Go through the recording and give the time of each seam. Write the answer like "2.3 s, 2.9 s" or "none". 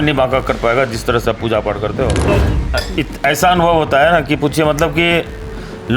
2.3 s